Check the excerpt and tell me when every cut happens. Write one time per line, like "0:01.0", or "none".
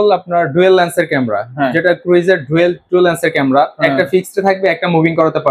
none